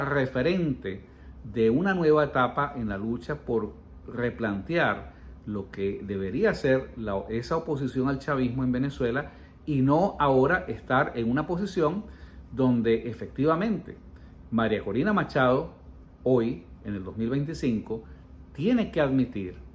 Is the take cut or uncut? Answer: uncut